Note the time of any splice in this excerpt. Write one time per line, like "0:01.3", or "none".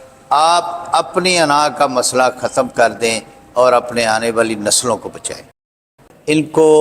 0:05.7